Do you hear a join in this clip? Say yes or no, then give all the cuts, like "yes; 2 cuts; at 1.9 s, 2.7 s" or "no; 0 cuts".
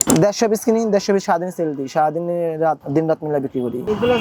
no; 0 cuts